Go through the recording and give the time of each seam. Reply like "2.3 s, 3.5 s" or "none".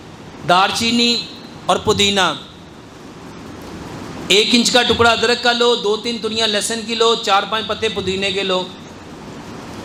none

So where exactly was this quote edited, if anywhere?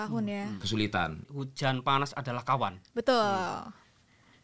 1.3 s

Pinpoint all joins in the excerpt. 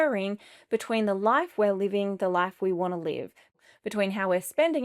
3.6 s

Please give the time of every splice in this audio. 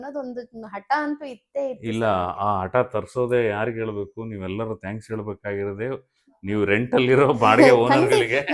none

